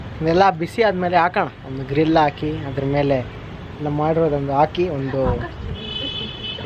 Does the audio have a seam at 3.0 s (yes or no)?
no